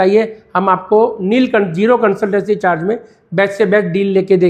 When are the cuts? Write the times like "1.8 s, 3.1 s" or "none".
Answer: none